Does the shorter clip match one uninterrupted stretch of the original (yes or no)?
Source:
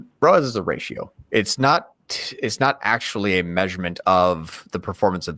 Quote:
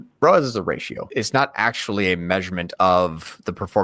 no